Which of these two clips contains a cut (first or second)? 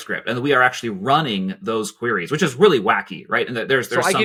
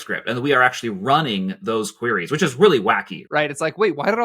second